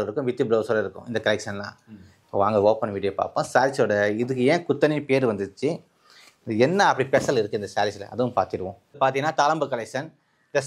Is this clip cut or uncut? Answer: cut